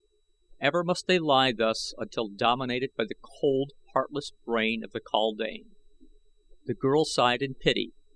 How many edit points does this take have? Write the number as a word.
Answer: one